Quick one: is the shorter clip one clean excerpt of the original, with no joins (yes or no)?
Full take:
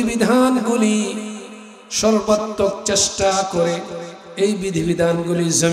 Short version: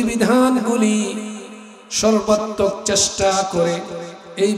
yes